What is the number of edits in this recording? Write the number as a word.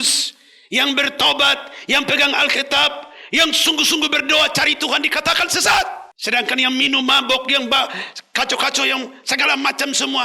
one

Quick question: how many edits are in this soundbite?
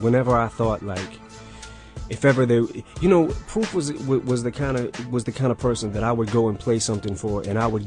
one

